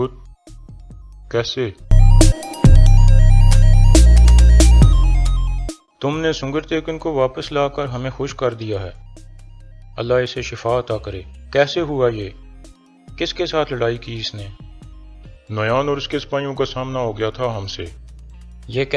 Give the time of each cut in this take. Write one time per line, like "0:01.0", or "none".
0:05.7

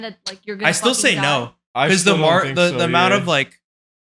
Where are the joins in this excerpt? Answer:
none

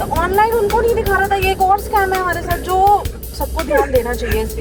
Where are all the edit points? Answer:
none

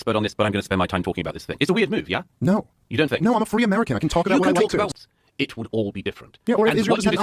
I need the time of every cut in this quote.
0:04.9

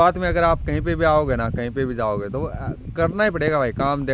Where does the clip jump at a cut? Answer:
none

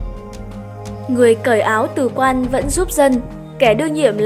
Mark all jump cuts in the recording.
0:01.1

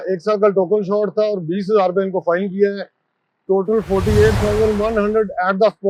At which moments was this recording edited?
none

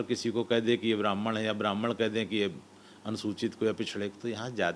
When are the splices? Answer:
none

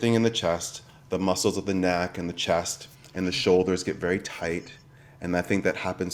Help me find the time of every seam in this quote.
none

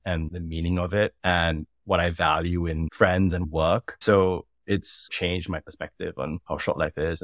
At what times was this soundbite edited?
0:03.4
0:05.1

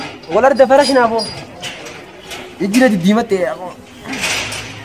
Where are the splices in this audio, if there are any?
none

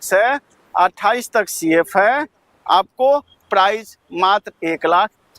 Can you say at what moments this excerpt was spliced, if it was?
none

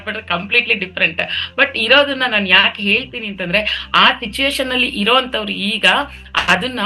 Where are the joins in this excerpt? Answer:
none

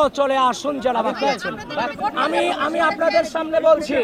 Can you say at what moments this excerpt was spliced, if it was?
none

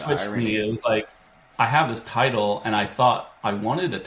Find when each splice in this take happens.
none

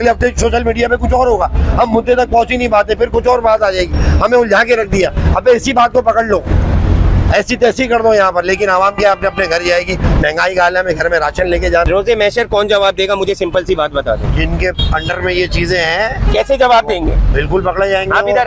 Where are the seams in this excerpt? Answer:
none

